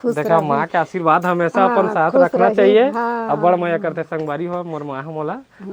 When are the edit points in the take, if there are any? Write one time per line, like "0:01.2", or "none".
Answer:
none